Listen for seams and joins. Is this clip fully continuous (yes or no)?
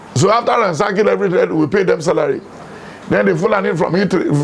yes